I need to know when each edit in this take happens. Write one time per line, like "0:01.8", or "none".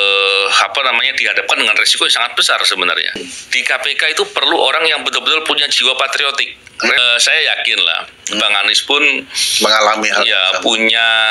0:03.2
0:07.0